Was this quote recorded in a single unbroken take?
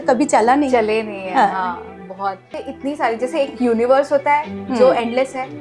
no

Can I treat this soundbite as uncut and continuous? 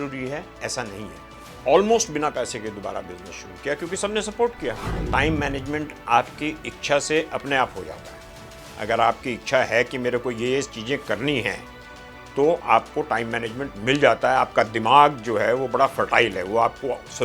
no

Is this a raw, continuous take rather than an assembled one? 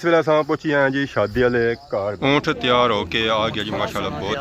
no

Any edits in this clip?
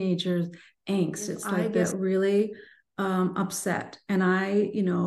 yes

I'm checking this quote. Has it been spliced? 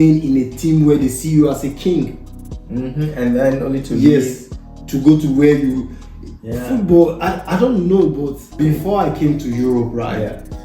yes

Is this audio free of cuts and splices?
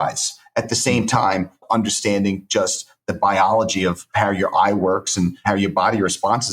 no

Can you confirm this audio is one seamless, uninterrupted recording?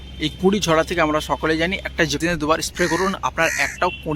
no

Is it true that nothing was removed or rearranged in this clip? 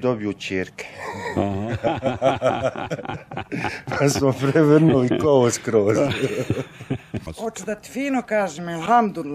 no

